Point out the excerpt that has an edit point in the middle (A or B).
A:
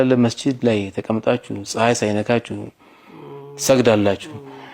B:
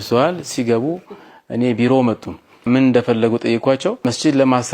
B